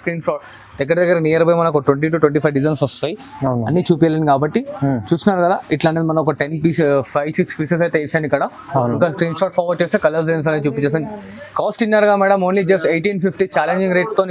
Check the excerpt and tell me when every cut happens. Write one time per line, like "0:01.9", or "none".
none